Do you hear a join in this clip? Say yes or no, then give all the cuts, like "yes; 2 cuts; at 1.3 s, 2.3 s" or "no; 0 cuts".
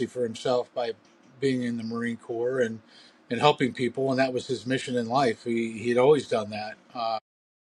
no; 0 cuts